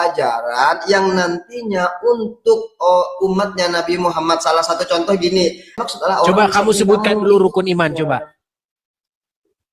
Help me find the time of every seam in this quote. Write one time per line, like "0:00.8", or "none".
0:05.8